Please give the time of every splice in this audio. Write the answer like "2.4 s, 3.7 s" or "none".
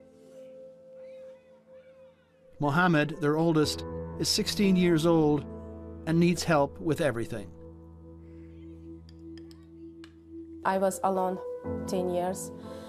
none